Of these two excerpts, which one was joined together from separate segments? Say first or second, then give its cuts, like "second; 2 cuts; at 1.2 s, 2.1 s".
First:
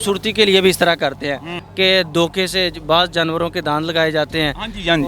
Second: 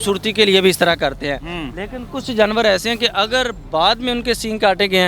first; 1 cut; at 1.6 s